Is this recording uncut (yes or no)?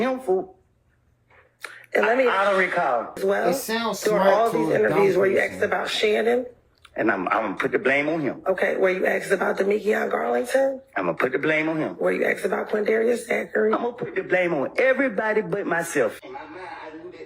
no